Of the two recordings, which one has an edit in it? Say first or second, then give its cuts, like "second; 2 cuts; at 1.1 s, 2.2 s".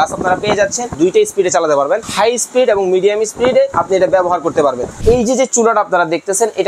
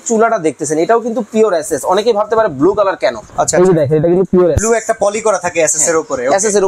first; 4 cuts; at 0.9 s, 2.1 s, 3.8 s, 4.9 s